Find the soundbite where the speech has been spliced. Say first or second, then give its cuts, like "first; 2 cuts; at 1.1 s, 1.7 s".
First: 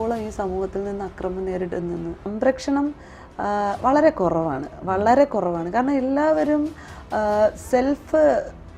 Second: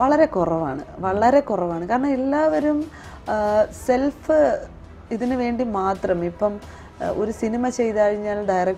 first; 1 cut; at 2.3 s